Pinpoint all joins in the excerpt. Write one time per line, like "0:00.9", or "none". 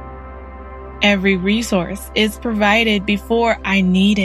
0:01.0